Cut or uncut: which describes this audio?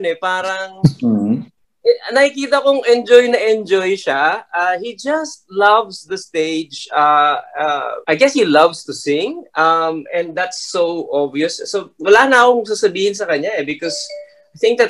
cut